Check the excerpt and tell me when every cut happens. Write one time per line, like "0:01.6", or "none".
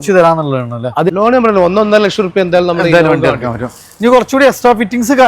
0:01.1

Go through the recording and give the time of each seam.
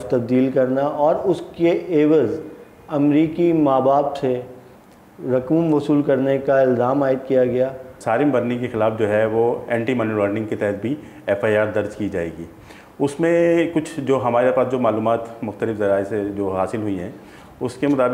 0:08.0

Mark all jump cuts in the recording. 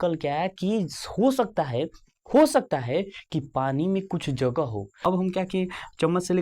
0:05.0

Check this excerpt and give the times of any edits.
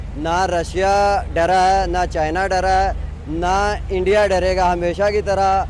none

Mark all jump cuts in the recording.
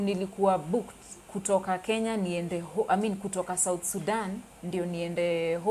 none

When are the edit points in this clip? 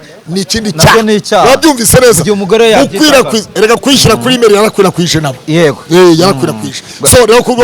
none

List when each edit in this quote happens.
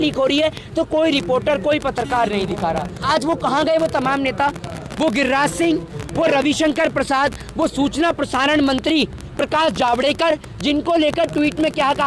0:03.0

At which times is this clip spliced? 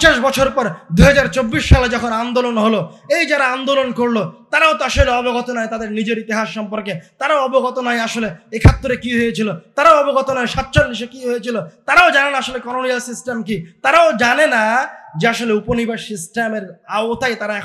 none

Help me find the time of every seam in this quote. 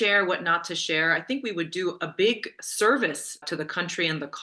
0:03.4

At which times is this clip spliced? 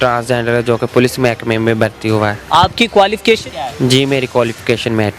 0:02.4
0:03.6

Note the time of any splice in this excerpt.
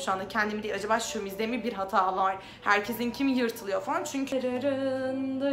0:04.3

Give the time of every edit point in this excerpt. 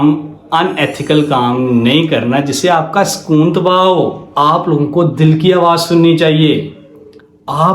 0:04.2

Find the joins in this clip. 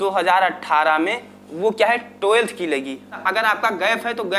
0:03.2

